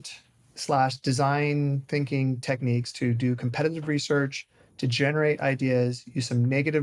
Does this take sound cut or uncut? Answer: uncut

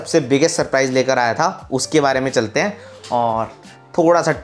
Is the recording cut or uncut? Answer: uncut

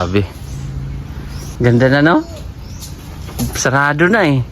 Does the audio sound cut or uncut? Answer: cut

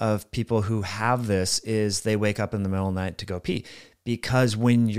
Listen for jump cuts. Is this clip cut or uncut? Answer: uncut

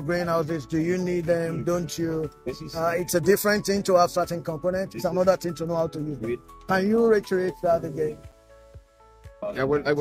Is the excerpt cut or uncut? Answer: uncut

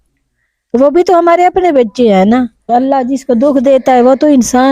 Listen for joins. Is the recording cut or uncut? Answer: cut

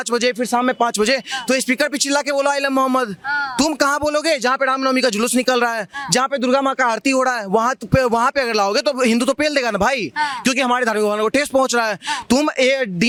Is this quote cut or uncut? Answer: uncut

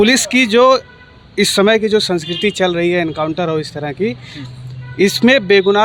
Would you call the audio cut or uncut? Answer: uncut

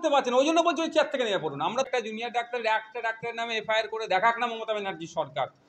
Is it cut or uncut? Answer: cut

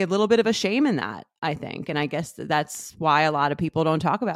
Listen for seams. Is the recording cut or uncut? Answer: uncut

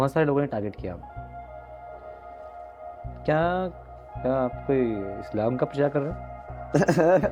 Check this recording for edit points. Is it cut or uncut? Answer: uncut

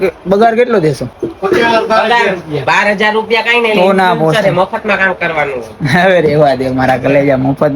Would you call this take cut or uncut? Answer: cut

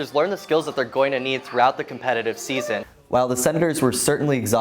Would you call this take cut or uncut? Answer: cut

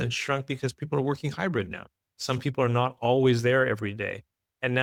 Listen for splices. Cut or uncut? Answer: uncut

